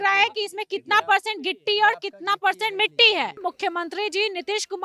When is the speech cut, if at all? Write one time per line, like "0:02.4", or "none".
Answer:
0:03.4